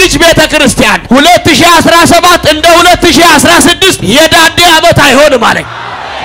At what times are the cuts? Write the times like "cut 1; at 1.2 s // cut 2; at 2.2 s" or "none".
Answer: cut 1; at 1.0 s // cut 2; at 4.0 s